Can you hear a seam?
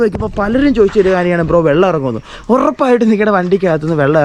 no; 0 cuts

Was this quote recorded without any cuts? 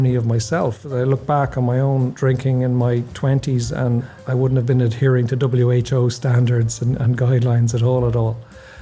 no; 3 cuts; at 0.8 s, 2.1 s, 4.2 s

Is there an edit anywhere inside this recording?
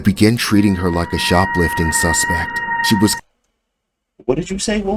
no; 0 cuts

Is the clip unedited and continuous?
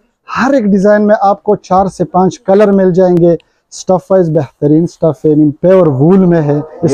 yes; 0 cuts

